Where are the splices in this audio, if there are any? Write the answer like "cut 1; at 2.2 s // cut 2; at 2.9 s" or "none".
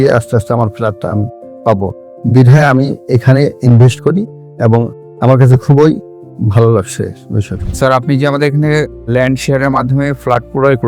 none

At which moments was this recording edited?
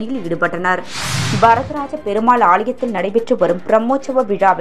cut 1; at 1.2 s

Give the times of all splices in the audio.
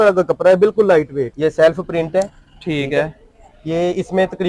cut 1; at 1.3 s

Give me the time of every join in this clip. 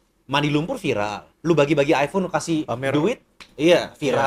none

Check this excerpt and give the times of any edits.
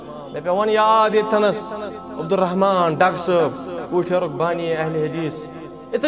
none

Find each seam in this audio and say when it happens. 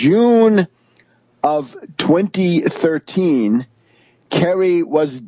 none

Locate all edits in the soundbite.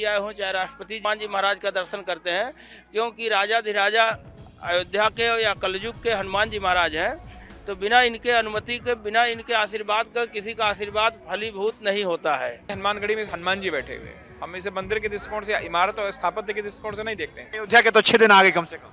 cut 1; at 1.0 s // cut 2; at 12.7 s // cut 3; at 17.4 s

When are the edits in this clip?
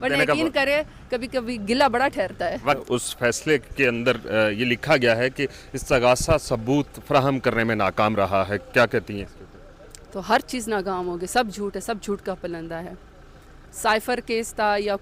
cut 1; at 2.8 s

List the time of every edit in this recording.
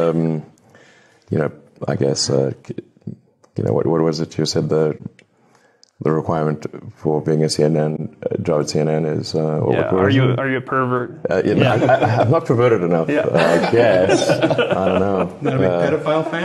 none

